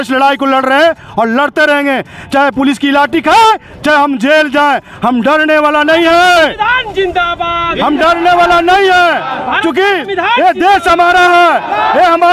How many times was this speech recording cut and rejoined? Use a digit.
0